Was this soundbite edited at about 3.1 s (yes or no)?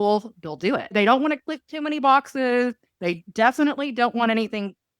no